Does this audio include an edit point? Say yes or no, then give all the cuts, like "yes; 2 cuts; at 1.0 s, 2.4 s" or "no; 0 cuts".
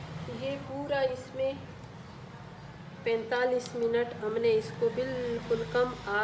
no; 0 cuts